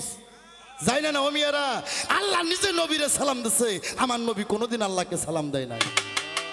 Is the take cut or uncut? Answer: uncut